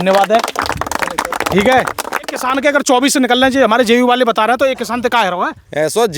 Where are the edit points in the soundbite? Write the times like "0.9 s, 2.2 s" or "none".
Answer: 2.4 s